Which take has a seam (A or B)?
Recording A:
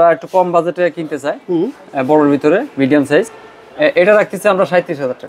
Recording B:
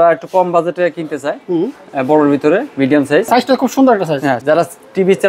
B